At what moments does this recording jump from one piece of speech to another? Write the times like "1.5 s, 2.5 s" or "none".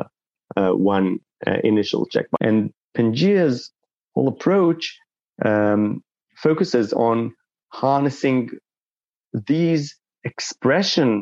2.4 s